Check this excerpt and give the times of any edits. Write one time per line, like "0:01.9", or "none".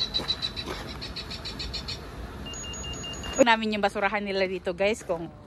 0:03.5